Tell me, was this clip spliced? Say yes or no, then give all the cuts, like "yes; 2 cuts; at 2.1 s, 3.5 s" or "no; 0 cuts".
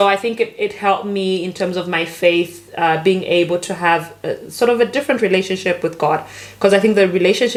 no; 0 cuts